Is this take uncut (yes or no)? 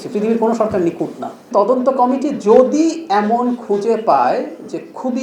no